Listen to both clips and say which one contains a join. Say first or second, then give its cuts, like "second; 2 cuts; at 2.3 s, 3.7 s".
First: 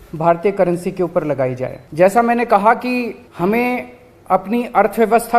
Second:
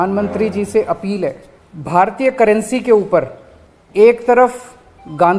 first; 1 cut; at 3.2 s